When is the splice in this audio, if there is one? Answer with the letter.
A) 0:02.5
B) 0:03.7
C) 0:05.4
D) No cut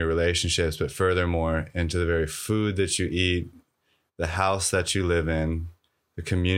D